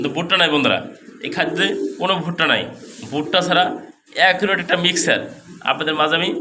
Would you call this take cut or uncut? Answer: uncut